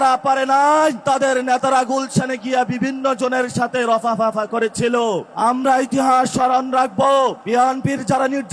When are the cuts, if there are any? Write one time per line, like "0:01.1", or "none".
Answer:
0:01.0
0:05.3
0:07.4